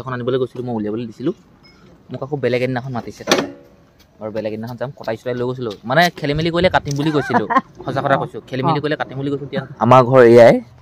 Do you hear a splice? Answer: no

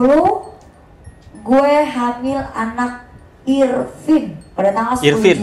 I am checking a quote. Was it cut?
no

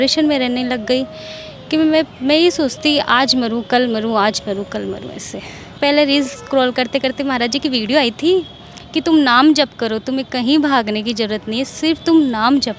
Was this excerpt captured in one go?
no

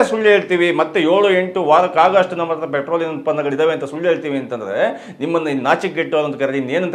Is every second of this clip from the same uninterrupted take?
yes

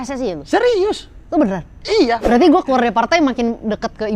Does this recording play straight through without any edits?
no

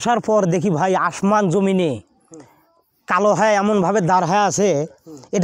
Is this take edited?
no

